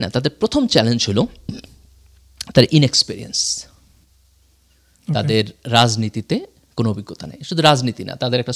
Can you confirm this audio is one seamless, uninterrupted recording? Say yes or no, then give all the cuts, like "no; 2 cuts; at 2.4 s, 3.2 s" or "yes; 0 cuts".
yes; 0 cuts